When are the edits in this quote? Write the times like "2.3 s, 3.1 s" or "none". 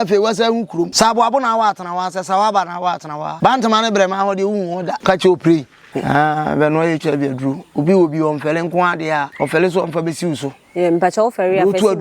0.9 s, 3.3 s, 5.0 s, 5.9 s, 9.3 s

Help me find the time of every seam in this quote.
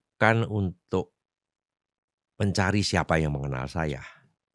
none

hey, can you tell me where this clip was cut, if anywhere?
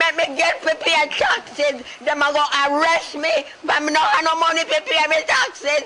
none

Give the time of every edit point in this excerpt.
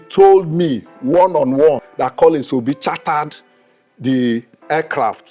1.9 s

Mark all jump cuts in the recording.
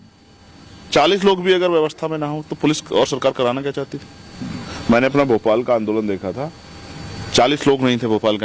none

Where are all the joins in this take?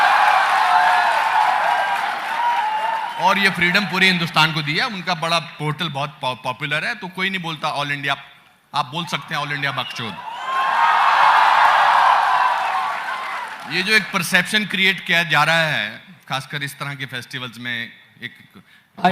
6.1 s

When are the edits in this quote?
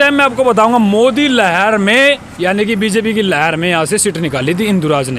none

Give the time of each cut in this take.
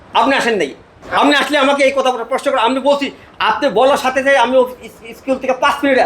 none

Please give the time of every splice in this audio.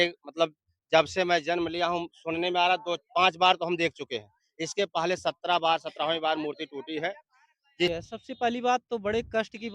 7.9 s

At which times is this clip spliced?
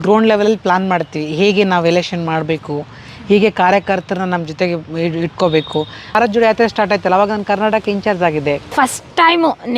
6.2 s, 8.7 s

